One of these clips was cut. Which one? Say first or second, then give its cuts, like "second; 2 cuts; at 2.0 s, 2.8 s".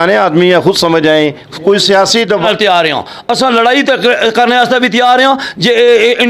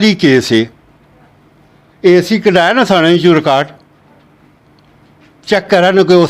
first; 1 cut; at 2.4 s